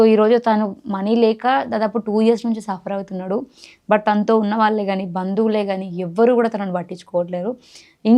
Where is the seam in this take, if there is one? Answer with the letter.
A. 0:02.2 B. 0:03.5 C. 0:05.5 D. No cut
D